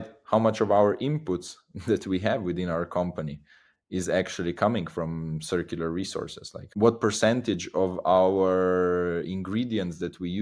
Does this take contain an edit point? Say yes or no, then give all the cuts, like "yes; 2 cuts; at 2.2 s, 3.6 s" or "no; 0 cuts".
yes; 1 cut; at 6.6 s